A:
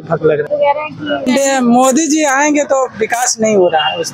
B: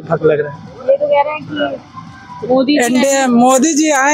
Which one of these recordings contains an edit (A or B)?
A